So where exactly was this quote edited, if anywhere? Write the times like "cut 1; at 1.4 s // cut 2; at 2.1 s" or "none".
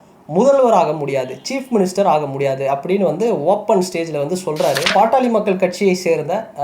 cut 1; at 4.9 s